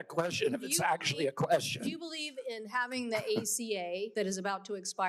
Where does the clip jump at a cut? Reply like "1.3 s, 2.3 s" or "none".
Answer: 4.1 s